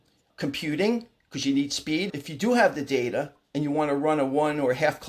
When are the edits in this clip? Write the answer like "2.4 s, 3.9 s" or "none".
2.1 s